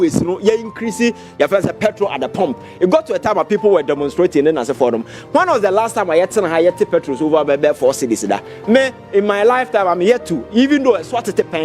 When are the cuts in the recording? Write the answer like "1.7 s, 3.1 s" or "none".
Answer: none